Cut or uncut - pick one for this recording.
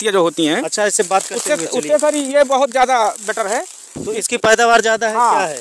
cut